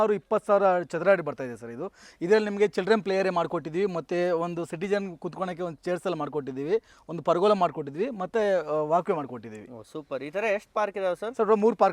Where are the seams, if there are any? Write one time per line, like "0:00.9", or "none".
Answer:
none